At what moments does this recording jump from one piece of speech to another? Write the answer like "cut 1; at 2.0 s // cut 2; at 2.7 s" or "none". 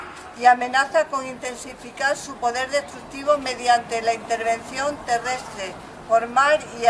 cut 1; at 4.4 s